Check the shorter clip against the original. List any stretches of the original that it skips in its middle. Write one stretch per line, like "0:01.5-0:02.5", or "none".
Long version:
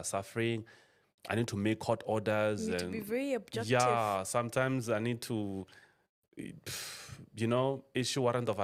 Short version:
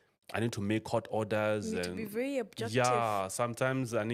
none